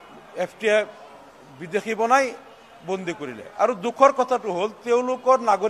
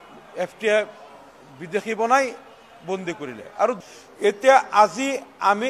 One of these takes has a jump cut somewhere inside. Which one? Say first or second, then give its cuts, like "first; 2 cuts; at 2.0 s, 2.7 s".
second; 1 cut; at 3.8 s